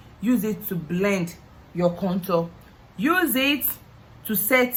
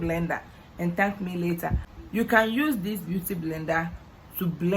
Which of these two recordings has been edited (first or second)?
second